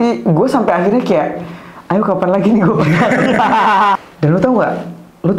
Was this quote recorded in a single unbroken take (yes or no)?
no